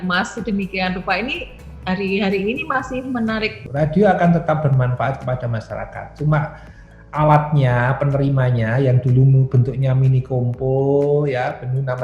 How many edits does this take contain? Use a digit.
1